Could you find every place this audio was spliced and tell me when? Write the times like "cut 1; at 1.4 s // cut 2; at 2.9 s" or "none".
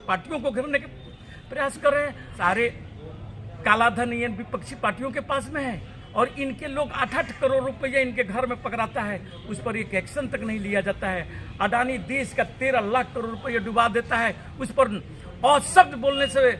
cut 1; at 2.3 s